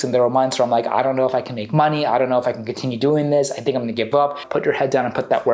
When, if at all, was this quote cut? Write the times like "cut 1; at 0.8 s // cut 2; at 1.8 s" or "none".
cut 1; at 4.4 s